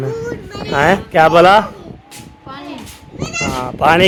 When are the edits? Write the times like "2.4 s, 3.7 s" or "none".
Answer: none